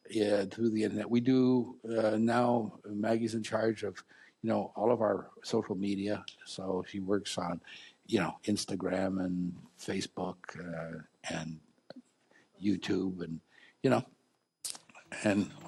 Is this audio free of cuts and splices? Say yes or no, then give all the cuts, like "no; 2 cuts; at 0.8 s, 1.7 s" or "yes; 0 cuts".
yes; 0 cuts